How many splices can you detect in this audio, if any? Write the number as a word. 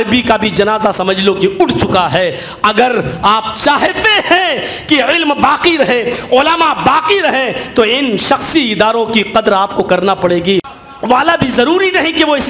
one